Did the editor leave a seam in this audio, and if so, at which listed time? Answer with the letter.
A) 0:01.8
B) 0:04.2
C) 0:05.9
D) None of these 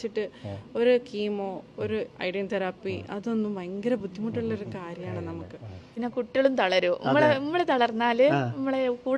C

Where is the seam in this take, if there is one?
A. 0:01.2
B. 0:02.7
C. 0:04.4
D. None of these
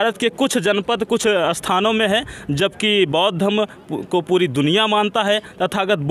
D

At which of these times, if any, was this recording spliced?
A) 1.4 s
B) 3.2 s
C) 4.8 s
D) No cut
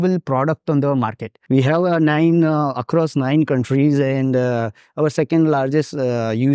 A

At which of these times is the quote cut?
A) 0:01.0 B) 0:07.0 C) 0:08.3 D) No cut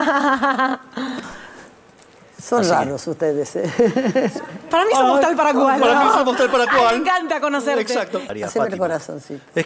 C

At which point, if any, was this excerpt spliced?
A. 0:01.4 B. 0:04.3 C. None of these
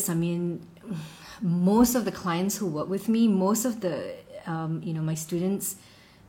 C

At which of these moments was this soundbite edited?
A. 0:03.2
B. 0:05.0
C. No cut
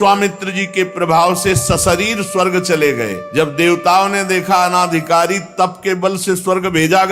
A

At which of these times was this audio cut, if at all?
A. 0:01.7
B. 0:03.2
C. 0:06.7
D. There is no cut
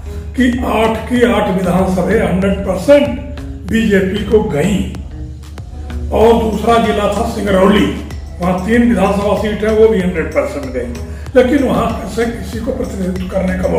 D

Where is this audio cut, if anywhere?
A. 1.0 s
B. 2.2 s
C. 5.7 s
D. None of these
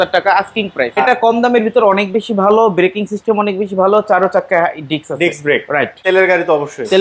A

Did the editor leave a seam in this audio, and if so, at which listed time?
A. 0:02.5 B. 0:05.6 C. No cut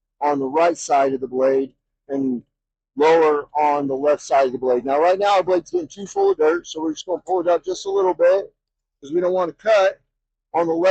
C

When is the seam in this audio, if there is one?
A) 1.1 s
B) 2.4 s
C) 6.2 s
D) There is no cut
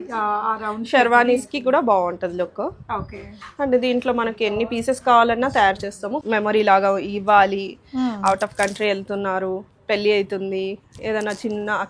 C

